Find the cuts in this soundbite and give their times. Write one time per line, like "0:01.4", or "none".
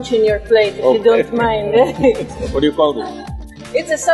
0:02.4